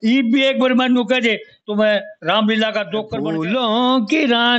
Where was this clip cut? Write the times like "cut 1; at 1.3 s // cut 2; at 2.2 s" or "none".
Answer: cut 1; at 3.1 s